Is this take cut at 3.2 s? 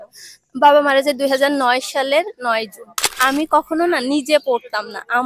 yes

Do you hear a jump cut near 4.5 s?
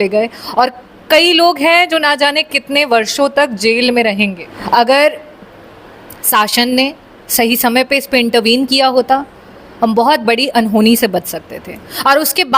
yes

